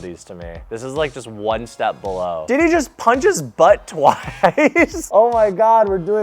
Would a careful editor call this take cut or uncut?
cut